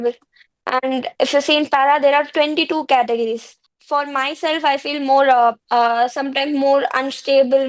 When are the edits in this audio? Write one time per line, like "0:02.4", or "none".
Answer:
0:03.7
0:05.6